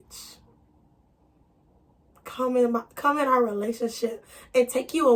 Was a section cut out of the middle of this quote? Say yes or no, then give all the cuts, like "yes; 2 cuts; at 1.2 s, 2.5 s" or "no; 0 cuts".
no; 0 cuts